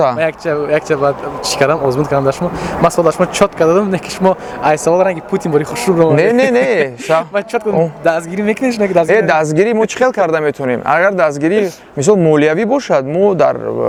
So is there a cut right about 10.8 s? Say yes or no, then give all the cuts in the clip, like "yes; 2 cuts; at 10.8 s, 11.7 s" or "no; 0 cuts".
no; 0 cuts